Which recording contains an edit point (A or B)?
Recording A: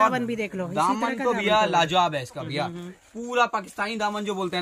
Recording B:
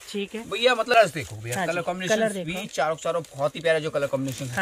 B